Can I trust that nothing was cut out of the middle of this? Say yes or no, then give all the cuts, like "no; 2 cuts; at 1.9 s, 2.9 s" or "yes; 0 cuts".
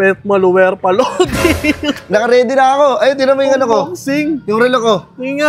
yes; 0 cuts